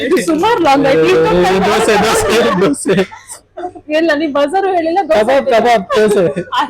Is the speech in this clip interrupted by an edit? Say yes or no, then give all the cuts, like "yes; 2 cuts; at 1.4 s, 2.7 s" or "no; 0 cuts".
no; 0 cuts